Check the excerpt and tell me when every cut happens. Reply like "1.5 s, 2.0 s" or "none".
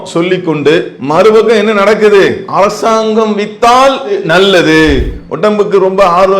1.0 s, 2.4 s, 5.1 s